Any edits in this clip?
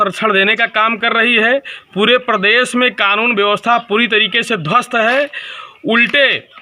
no; 0 cuts

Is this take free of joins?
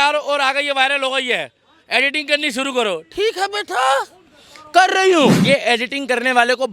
no; 1 cut; at 5.4 s

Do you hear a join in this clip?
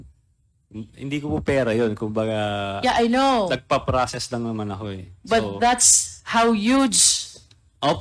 no; 0 cuts

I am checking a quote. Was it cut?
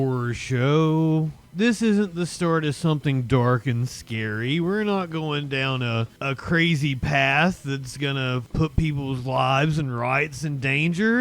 yes; 2 cuts; at 6.1 s, 8.4 s

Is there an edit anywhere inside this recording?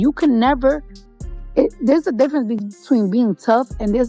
no; 0 cuts

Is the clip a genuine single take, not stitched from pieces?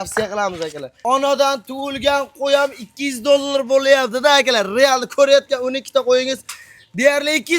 no; 1 cut; at 1.0 s

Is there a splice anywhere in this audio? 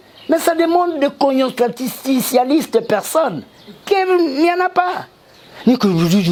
no; 0 cuts

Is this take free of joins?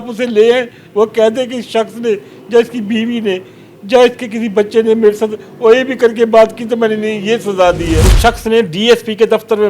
no; 1 cut; at 8.1 s

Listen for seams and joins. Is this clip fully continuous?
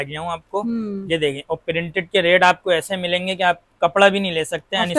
yes; 0 cuts

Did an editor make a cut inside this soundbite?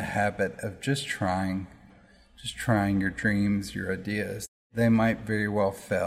yes; 2 cuts; at 1.8 s, 4.7 s

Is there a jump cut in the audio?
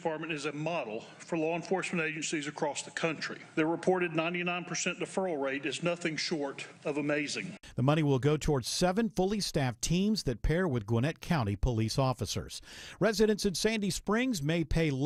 no; 0 cuts

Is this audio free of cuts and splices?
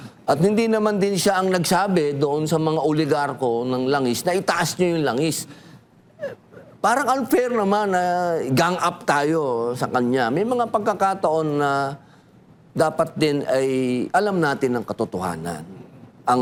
yes; 0 cuts

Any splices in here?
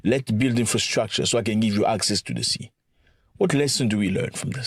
no; 0 cuts

